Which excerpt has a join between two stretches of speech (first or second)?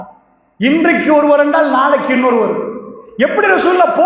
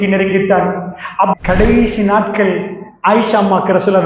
second